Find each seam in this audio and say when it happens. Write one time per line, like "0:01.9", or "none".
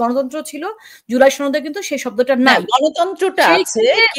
none

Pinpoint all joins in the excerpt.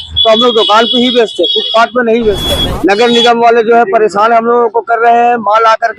0:02.5

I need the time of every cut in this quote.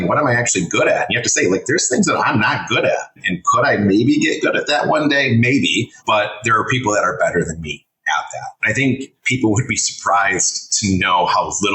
0:03.2
0:06.0
0:08.6

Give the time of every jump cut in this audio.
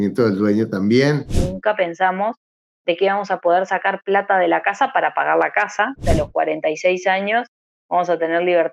0:01.3
0:06.0

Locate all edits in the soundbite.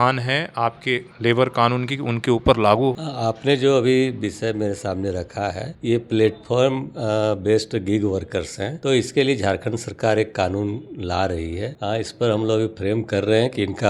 none

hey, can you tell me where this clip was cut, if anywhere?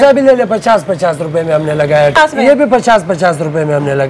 0:02.2

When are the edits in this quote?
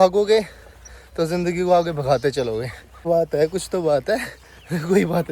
0:03.1

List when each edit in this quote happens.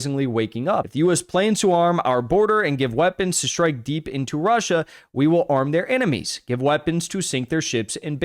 none

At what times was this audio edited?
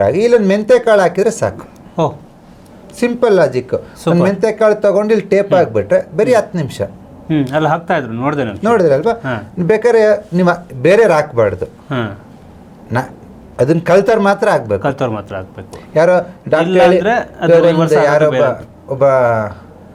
none

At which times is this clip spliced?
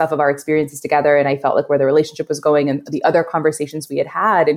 none

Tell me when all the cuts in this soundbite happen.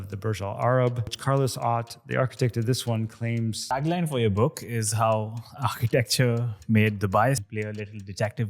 0:01.2
0:03.7
0:07.4

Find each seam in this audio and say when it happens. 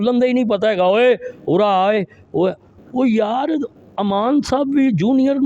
none

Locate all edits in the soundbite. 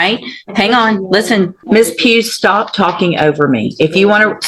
0:01.6

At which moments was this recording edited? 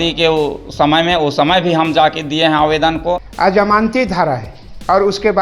0:03.3

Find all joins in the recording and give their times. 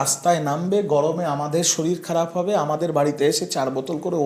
none

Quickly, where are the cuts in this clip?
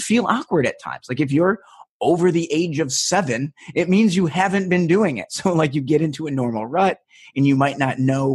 0:05.7

